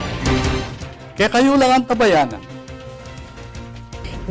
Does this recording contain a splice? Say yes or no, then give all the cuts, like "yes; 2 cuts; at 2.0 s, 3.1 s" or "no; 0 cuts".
no; 0 cuts